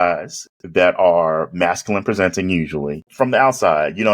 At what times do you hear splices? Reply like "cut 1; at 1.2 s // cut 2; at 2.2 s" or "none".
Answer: cut 1; at 3.0 s

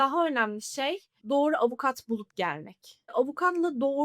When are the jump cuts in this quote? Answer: cut 1; at 3.1 s

